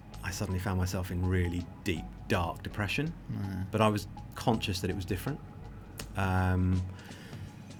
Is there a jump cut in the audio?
no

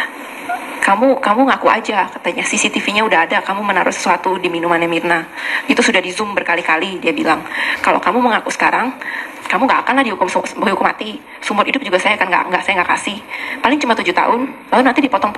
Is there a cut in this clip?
no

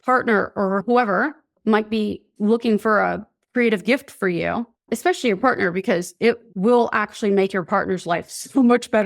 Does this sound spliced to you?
yes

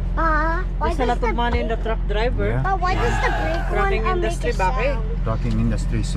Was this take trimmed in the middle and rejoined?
no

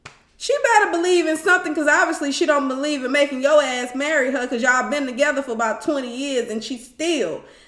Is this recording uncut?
yes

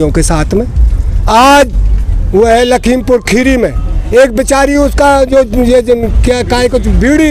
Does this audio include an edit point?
no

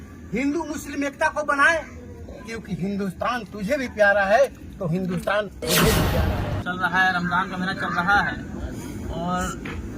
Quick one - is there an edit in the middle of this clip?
yes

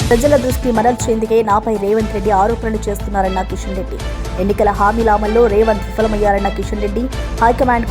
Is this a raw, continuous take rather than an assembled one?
yes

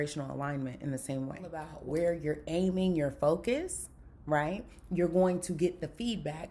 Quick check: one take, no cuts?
no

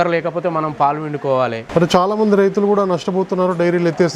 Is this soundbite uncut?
no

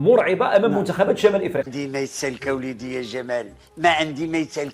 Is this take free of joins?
no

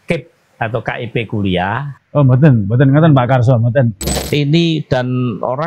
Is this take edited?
yes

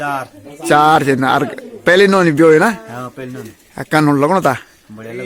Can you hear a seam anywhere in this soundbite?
no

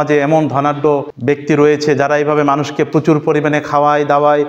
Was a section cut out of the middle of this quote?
yes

